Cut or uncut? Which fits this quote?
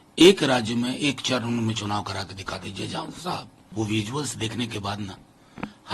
cut